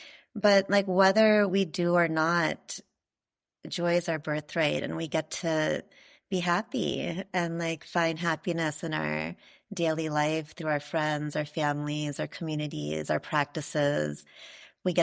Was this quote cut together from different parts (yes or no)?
no